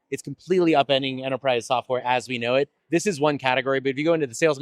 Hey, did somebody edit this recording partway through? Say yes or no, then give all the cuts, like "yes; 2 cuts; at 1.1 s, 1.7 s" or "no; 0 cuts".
no; 0 cuts